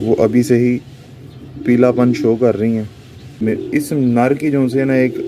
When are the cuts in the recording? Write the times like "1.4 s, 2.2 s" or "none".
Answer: 3.4 s